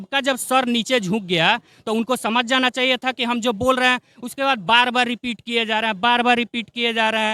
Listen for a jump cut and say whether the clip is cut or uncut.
uncut